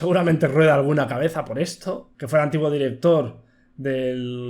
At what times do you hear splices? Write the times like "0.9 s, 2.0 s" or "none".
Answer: 2.1 s